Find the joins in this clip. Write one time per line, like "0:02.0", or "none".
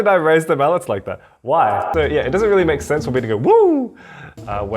0:01.9

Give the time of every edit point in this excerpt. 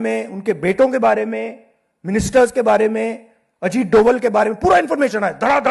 none

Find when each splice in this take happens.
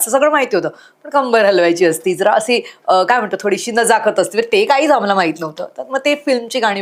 none

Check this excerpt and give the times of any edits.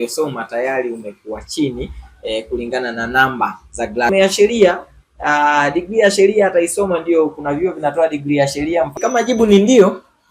0:04.1
0:09.0

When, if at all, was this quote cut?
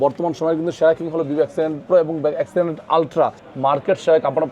0:03.4

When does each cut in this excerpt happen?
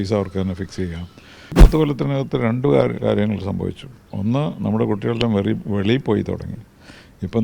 0:01.5

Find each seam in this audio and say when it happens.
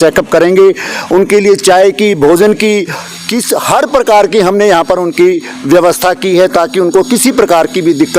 none

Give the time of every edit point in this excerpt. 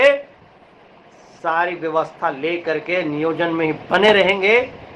none

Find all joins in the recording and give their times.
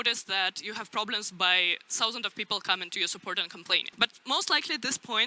0:03.9

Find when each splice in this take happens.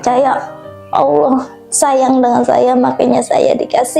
none

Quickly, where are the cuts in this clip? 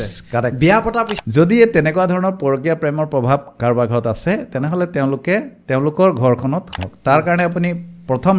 0:01.1
0:06.7

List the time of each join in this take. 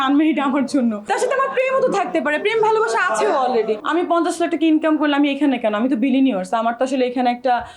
0:01.1
0:03.8

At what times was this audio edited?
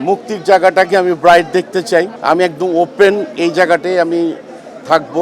0:02.1

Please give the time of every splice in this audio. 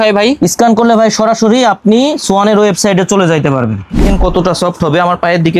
0:04.0

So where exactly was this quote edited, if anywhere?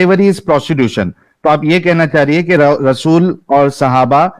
none

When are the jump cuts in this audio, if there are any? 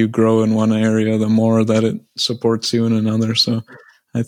none

